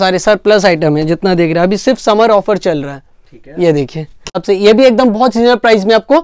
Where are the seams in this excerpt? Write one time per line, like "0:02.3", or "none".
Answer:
0:04.4

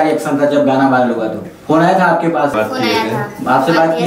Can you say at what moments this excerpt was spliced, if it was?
0:01.5
0:02.5

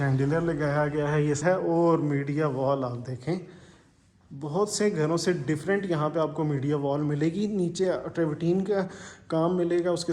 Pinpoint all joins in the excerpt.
0:01.4

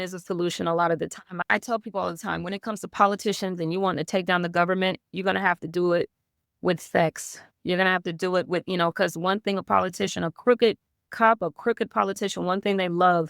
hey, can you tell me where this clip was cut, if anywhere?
0:01.4

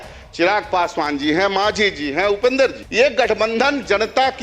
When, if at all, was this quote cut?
0:02.8

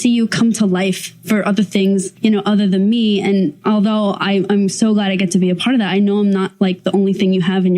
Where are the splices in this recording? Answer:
0:02.1
0:03.6

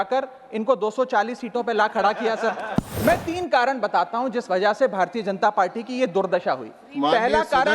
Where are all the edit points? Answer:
0:02.9

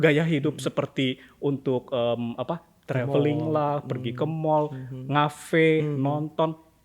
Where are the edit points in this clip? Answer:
none

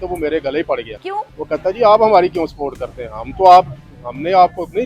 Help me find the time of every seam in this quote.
none

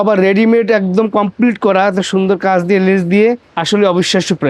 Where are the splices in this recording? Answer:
0:03.5

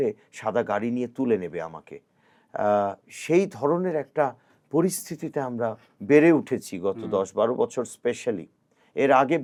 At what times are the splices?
none

